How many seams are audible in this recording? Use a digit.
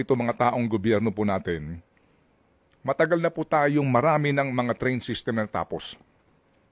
1